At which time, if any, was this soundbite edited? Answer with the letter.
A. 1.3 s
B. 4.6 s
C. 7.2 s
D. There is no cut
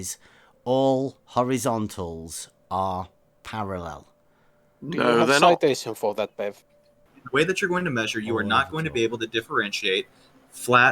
C